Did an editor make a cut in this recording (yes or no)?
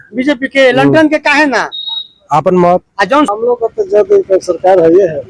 yes